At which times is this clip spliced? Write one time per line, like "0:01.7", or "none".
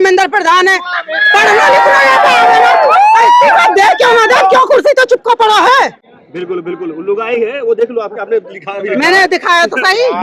none